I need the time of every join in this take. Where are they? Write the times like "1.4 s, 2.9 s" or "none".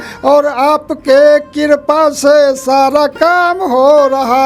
none